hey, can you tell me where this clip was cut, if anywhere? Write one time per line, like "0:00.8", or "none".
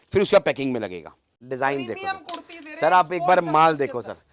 0:01.4